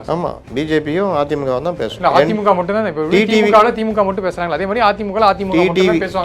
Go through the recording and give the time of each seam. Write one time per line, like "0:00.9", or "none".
0:01.9